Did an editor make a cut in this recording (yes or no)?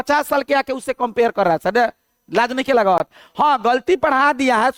no